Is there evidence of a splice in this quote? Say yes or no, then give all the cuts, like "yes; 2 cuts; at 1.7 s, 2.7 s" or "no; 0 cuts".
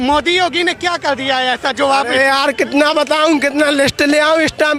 no; 0 cuts